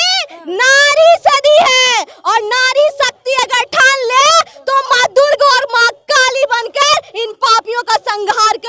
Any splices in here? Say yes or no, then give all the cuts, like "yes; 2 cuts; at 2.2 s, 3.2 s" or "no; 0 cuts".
no; 0 cuts